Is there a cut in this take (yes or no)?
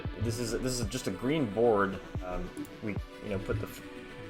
yes